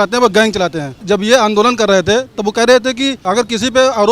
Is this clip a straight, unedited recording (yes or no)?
no